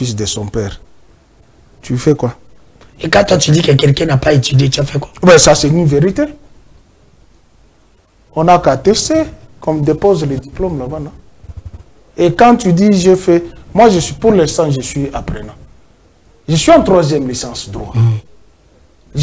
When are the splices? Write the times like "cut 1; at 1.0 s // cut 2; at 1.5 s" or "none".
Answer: none